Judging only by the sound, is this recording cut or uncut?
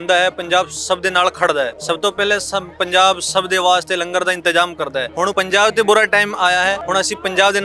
cut